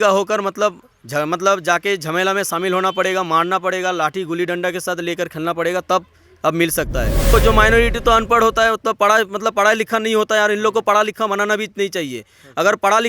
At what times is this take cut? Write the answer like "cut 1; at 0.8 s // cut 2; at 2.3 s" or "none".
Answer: cut 1; at 7.3 s